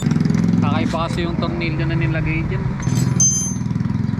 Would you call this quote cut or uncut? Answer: uncut